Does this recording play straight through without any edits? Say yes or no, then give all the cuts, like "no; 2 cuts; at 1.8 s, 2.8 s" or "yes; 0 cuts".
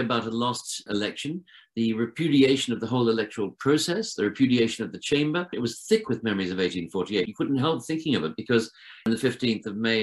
no; 3 cuts; at 5.5 s, 7.3 s, 9.1 s